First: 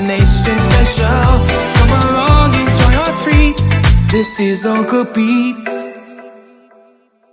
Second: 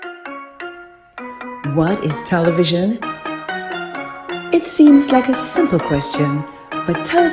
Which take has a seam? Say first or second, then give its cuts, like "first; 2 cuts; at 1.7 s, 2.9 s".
second; 1 cut; at 1.6 s